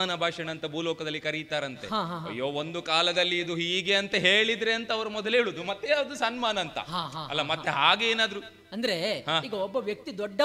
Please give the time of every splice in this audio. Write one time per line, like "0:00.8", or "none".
none